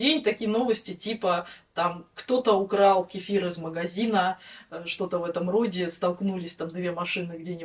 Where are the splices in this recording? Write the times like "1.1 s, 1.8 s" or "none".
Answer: none